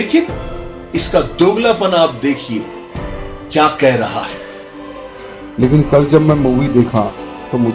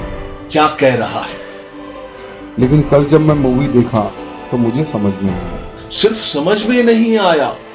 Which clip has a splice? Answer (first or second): second